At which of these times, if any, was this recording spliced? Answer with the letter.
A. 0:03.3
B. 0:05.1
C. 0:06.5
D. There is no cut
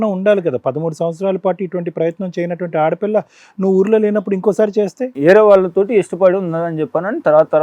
B